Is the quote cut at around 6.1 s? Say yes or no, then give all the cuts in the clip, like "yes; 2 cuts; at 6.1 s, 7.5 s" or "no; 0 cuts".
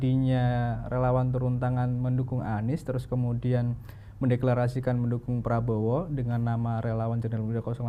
no; 0 cuts